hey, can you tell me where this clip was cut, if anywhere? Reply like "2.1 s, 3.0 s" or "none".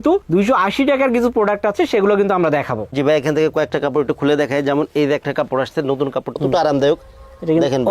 2.8 s, 6.4 s